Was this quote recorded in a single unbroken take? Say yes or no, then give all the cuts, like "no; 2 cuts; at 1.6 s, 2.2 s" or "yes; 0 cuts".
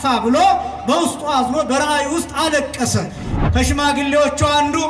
no; 1 cut; at 3.3 s